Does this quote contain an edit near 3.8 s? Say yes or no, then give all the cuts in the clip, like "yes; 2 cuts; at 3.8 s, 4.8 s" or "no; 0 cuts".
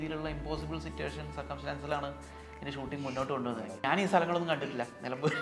yes; 1 cut; at 3.8 s